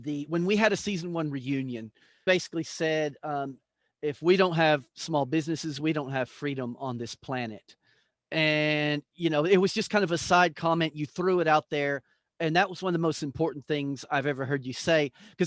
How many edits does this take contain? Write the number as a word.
one